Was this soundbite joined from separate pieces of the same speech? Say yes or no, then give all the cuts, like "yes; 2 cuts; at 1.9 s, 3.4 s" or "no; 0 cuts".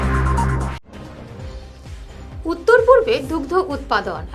no; 0 cuts